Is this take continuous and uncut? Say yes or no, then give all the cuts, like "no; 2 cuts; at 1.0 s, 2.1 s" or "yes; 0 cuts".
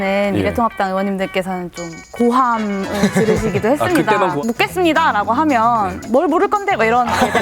no; 1 cut; at 4.3 s